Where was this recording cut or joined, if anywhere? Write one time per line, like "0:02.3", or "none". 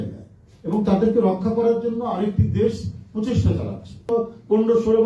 0:04.1